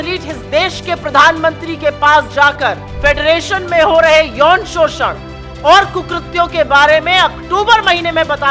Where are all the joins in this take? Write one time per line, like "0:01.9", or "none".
0:02.9